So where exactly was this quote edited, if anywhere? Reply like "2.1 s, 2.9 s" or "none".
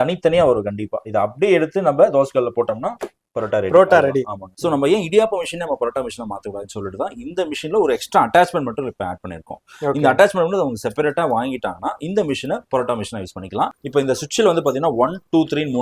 4.4 s, 13.8 s